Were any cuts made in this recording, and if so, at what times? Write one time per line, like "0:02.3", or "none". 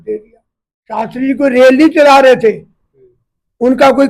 0:01.0